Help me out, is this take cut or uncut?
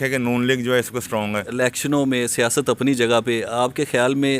cut